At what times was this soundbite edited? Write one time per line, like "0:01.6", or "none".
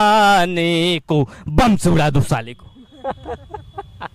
none